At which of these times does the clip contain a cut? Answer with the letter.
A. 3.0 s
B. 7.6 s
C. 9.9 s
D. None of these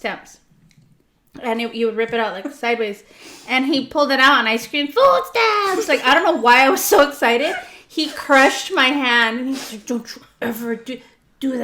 D